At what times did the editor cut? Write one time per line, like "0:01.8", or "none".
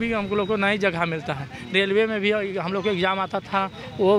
none